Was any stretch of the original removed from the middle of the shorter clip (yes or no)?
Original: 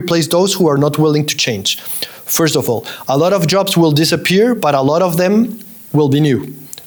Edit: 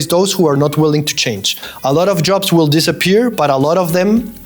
yes